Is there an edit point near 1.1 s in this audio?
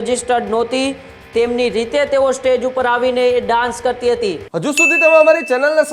no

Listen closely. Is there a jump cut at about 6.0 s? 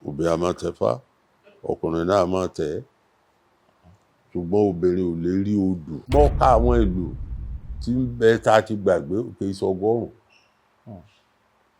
yes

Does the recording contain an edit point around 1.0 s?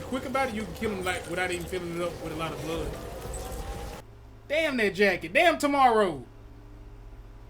no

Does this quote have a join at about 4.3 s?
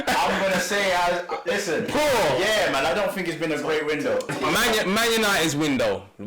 yes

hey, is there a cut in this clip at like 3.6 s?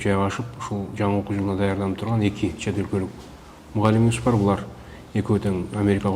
no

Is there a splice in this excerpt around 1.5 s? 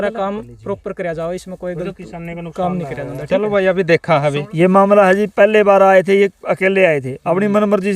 no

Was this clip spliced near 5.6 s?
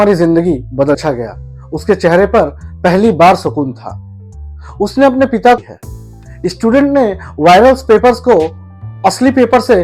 yes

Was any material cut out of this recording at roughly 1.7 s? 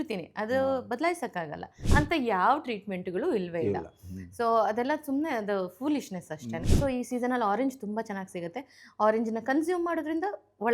yes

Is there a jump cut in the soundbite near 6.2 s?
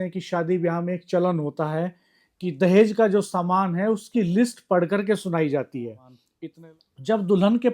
yes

